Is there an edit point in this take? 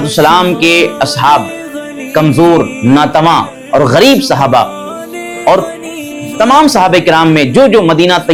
no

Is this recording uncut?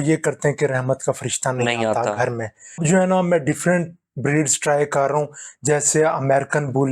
no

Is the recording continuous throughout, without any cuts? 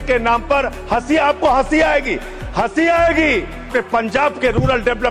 no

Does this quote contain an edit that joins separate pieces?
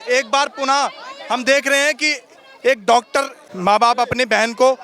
yes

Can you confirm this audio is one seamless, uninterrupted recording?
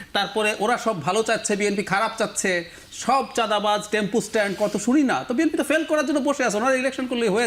yes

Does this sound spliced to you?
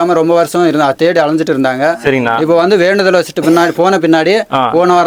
no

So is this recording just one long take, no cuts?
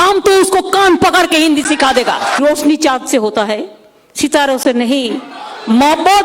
no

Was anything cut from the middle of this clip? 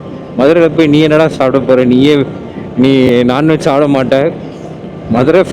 no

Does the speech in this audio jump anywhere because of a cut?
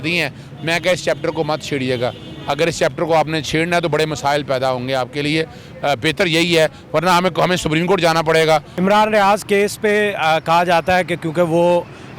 yes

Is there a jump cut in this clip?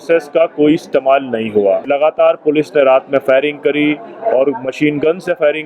yes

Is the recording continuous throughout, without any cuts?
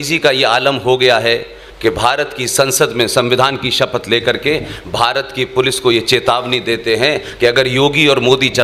yes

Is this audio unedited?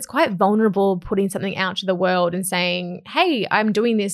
yes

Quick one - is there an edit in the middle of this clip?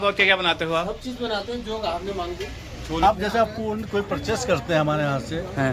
yes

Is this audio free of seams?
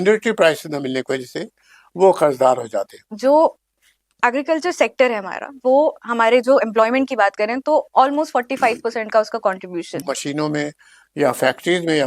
no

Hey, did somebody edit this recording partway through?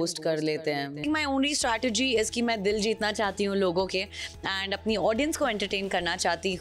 yes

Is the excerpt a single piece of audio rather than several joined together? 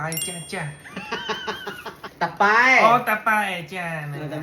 no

